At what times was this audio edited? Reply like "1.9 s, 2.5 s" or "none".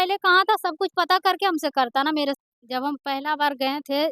2.4 s